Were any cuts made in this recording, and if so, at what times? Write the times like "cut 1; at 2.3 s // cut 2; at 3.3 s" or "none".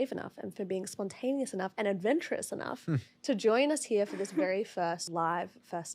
cut 1; at 5.1 s